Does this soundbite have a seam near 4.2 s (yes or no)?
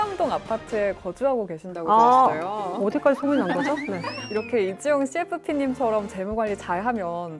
yes